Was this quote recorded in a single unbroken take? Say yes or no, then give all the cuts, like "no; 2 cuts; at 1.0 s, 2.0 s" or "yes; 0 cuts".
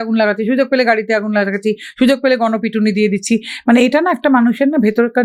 yes; 0 cuts